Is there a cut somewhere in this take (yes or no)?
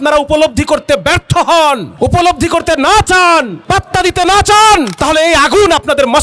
yes